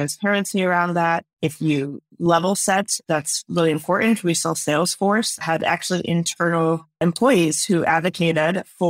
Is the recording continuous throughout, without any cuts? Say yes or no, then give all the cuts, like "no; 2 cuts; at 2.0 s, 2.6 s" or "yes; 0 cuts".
yes; 0 cuts